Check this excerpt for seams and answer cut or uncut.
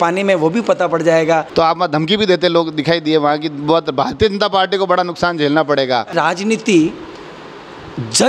cut